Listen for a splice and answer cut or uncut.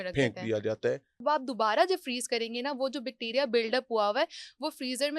cut